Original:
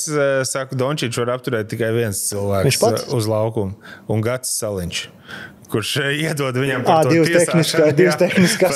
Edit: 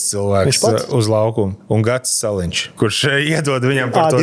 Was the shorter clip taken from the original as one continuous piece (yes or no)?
no